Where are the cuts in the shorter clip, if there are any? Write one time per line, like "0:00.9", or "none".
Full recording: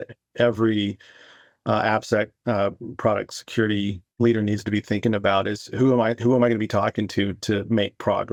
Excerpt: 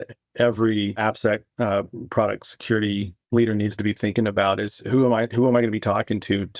0:01.0

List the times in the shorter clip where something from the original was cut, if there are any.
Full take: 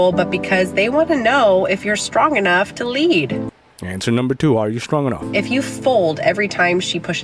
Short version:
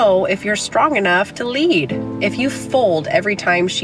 0:02.1

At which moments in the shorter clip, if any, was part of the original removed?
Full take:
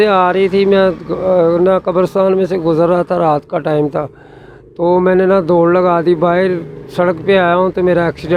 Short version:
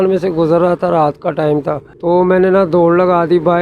0:01.9

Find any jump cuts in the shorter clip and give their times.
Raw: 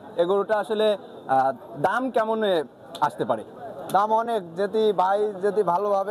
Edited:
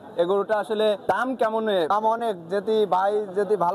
0:01.0
0:01.9

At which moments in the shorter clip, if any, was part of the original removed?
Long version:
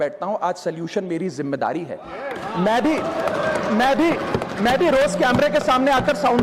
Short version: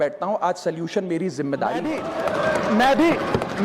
0:02.0

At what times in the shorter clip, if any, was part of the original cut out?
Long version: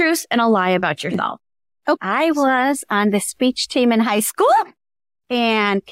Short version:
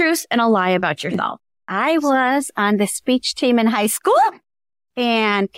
0:01.7

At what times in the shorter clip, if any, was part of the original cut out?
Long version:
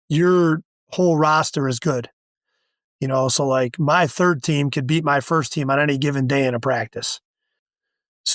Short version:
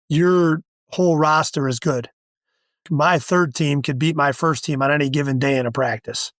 0:02.8

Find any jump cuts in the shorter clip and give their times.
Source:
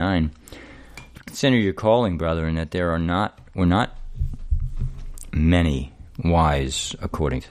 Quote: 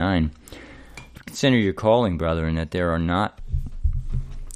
0:03.4

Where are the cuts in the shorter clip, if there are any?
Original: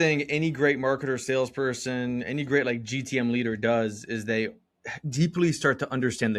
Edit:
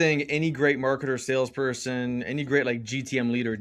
none

